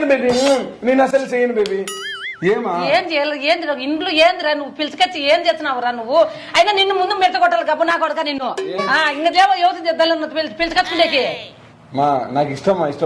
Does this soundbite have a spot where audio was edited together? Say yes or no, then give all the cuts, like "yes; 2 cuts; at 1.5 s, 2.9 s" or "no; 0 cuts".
no; 0 cuts